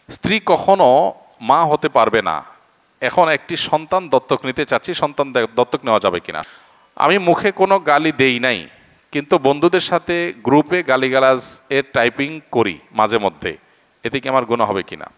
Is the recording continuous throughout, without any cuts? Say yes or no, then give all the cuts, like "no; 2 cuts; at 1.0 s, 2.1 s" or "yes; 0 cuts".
no; 1 cut; at 6.3 s